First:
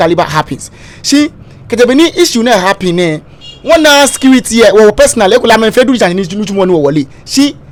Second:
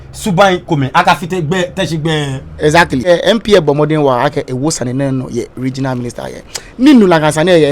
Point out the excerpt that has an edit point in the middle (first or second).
second